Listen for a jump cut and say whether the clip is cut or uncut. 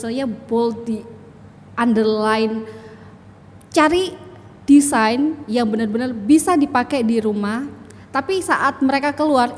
uncut